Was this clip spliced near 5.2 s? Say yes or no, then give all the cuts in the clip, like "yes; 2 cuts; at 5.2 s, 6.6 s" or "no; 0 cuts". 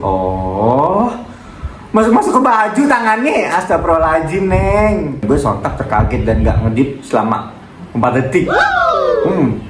yes; 1 cut; at 5.2 s